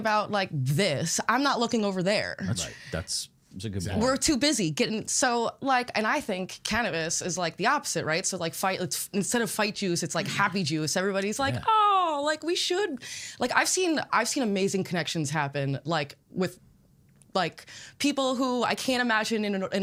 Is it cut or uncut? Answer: uncut